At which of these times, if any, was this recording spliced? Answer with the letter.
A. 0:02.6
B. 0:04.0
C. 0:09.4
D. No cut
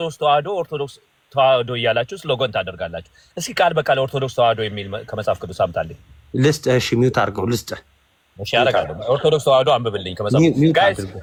D